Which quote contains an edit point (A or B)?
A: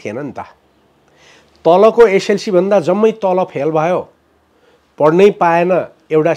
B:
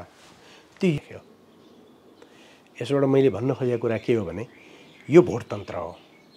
B